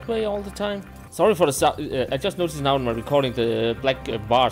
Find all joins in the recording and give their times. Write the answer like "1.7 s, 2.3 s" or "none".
1.0 s